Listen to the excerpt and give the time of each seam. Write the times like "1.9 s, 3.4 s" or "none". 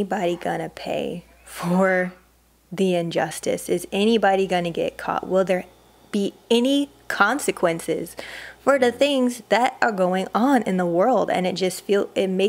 none